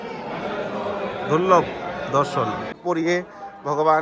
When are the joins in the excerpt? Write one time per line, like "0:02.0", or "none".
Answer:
0:02.8